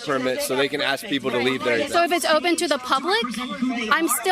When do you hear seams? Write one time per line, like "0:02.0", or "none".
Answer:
0:02.4